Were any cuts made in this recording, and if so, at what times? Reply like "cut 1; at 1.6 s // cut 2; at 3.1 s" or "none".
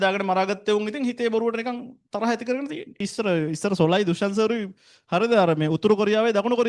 cut 1; at 3.1 s